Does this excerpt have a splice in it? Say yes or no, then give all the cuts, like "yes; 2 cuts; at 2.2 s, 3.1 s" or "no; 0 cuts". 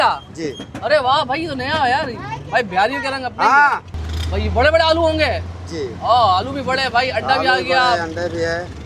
no; 0 cuts